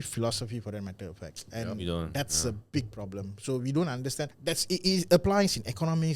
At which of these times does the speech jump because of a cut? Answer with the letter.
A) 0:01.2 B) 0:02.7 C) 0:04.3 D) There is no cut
C